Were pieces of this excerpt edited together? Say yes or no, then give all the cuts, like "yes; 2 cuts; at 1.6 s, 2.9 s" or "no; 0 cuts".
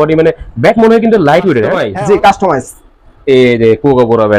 yes; 1 cut; at 1.8 s